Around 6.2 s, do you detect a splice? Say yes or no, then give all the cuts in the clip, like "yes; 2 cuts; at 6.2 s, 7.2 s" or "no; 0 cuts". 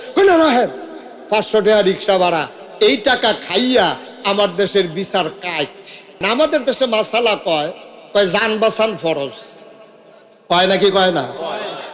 yes; 1 cut; at 6.2 s